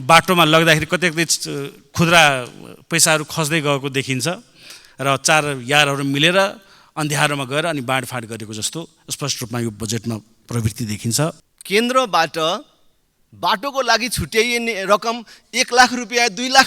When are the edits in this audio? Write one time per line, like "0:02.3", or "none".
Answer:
0:11.5